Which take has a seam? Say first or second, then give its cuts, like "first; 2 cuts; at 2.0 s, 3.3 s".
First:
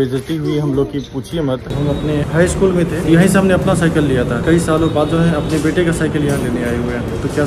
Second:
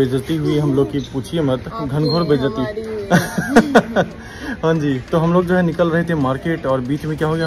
first; 3 cuts; at 1.7 s, 3.0 s, 4.4 s